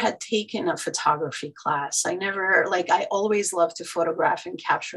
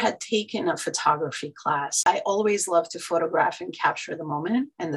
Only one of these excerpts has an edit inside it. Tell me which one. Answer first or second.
second